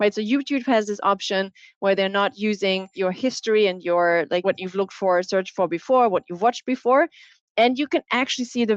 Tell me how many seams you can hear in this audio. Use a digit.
2